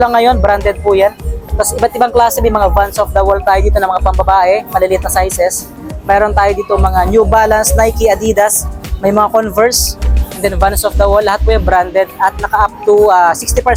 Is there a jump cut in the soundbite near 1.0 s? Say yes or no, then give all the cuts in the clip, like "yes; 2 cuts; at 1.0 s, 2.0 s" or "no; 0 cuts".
no; 0 cuts